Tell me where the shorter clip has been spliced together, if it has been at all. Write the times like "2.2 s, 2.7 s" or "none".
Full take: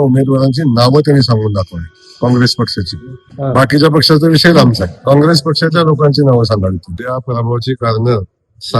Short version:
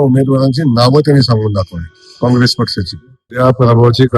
3.2 s